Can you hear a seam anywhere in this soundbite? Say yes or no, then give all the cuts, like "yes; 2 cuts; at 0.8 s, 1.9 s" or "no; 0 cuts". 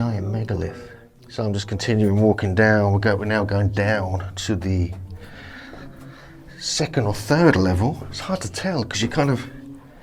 no; 0 cuts